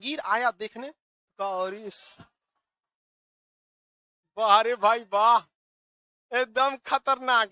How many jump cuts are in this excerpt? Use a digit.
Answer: 0